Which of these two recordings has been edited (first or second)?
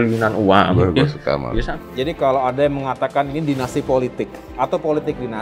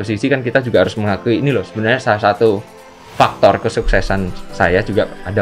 first